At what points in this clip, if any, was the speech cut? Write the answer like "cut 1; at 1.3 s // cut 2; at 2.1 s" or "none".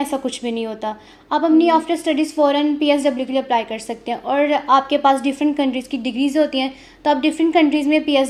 none